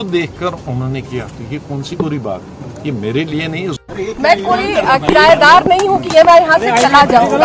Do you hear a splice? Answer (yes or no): no